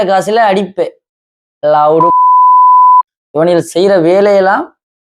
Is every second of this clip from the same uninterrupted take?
no; 2 cuts; at 2.0 s, 3.2 s

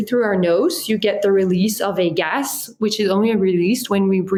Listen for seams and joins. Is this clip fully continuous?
yes; 0 cuts

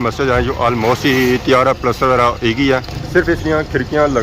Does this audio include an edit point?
no; 0 cuts

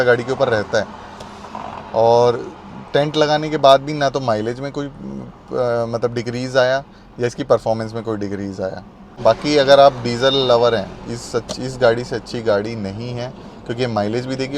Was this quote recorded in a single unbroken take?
no; 1 cut; at 9.2 s

